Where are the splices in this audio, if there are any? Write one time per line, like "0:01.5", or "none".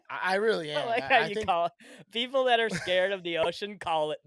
none